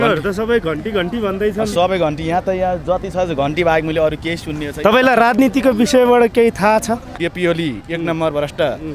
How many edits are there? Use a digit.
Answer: 1